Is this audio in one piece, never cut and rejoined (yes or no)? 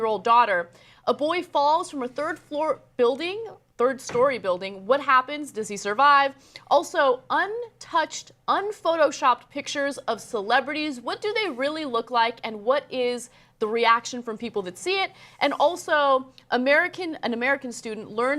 no